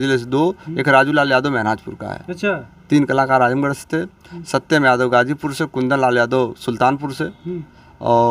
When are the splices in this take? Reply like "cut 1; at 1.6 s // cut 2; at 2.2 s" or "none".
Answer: none